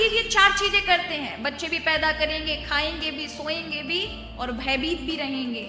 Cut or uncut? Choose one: uncut